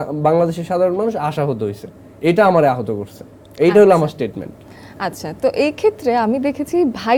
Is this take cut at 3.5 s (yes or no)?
no